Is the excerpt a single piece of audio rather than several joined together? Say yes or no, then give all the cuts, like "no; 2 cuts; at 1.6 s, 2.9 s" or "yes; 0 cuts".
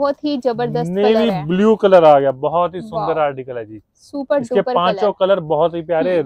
yes; 0 cuts